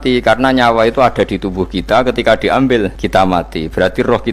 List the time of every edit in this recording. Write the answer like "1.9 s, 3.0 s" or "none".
3.0 s